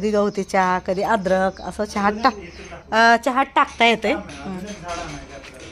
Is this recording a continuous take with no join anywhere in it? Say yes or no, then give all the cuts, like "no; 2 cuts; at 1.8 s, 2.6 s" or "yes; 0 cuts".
yes; 0 cuts